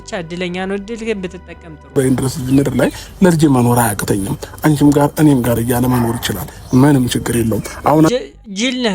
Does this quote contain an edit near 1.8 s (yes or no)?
yes